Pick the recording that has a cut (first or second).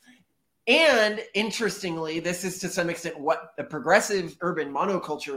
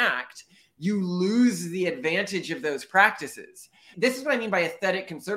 second